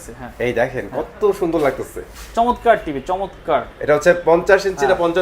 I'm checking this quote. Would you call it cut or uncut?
uncut